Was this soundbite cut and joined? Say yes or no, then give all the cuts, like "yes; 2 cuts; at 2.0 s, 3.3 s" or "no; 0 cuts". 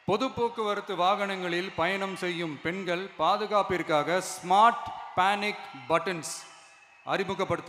no; 0 cuts